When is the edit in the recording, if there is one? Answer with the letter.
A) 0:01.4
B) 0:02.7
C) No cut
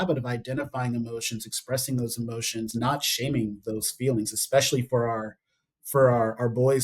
B